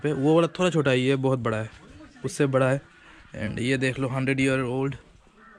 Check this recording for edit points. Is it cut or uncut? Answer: uncut